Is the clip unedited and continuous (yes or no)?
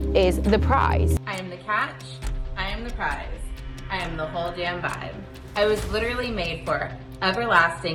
yes